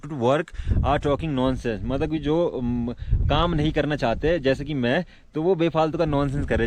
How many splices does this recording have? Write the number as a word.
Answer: zero